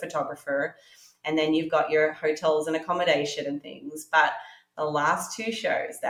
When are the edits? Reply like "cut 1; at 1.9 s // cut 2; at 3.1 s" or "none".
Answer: none